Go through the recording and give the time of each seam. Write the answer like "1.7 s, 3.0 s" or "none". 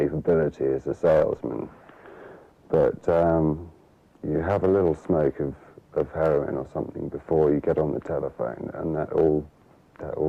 none

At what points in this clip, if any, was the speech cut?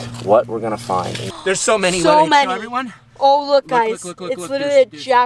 1.2 s

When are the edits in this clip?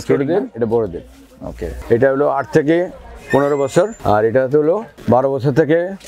1.7 s, 4.0 s, 4.9 s

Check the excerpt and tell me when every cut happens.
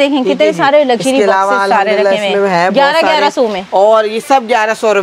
none

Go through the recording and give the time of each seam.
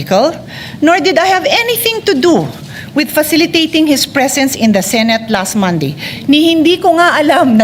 none

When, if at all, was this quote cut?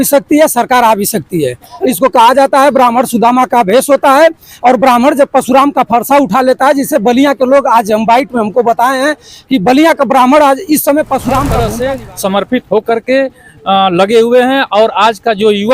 11.5 s

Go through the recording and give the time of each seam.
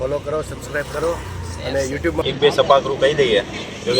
2.2 s

